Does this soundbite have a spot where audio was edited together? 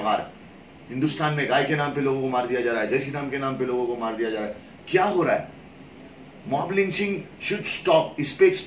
no; 0 cuts

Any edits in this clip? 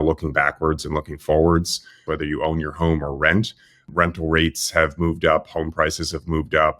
yes; 2 cuts; at 2.0 s, 3.8 s

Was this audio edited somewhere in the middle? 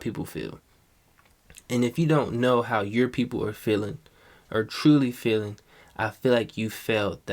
no; 0 cuts

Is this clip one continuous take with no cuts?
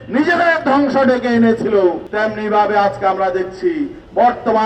no; 1 cut; at 2.1 s

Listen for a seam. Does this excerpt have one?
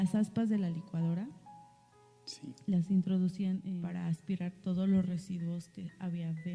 yes; 1 cut; at 3.7 s

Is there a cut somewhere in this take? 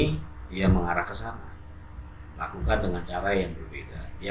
no; 0 cuts

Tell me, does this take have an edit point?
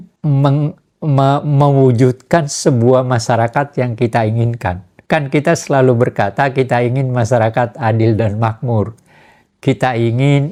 no; 0 cuts

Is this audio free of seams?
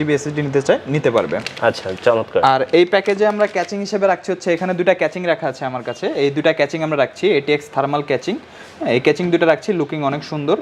yes; 0 cuts

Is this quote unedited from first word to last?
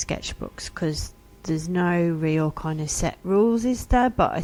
yes; 0 cuts

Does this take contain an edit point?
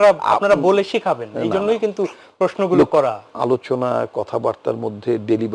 yes; 1 cut; at 3.3 s

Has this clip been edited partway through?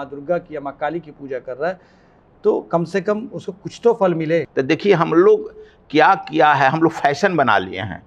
yes; 1 cut; at 4.5 s

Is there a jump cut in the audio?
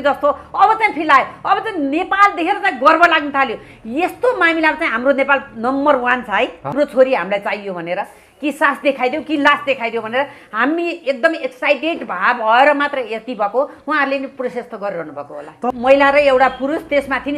yes; 2 cuts; at 6.7 s, 15.6 s

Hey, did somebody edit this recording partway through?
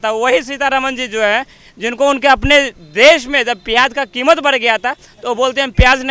no; 0 cuts

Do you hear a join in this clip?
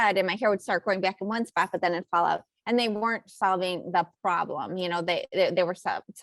no; 0 cuts

